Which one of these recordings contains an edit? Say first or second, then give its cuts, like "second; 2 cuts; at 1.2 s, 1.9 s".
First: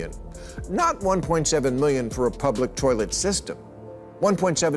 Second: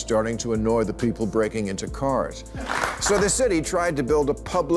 second; 1 cut; at 2.6 s